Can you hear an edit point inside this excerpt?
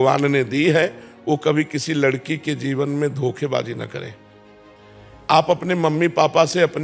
no; 0 cuts

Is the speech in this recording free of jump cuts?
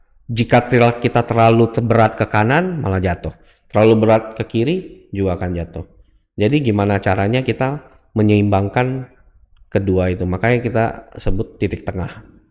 yes; 0 cuts

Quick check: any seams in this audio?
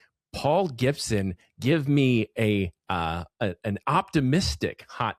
no; 0 cuts

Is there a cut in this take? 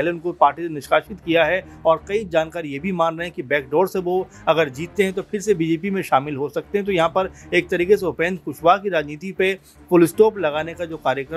no; 0 cuts

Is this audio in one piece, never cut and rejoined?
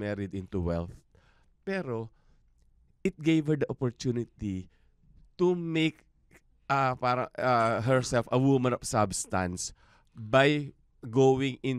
yes; 0 cuts

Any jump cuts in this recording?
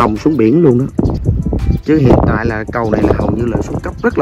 yes; 1 cut; at 1.2 s

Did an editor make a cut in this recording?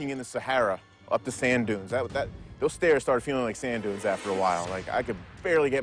no; 0 cuts

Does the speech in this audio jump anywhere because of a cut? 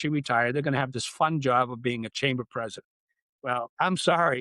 yes; 1 cut; at 3.5 s

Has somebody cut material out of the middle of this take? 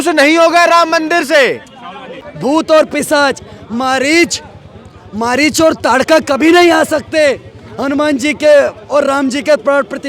yes; 1 cut; at 2.3 s

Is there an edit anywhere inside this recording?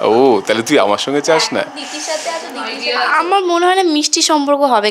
yes; 1 cut; at 2.8 s

